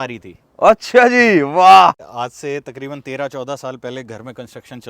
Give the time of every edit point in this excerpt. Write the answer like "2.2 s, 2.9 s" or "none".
2.1 s